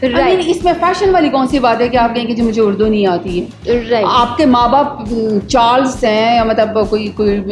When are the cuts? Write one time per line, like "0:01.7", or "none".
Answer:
none